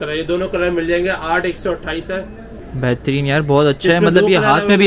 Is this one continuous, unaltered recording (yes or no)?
no